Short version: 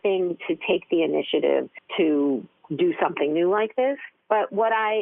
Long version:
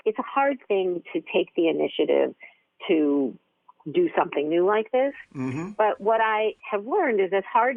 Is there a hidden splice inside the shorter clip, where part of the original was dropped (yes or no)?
yes